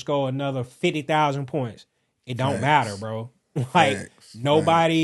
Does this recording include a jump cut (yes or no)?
no